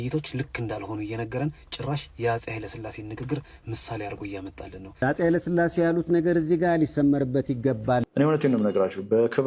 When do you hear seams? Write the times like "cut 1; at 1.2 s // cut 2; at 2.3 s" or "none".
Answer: cut 1; at 5.0 s // cut 2; at 8.1 s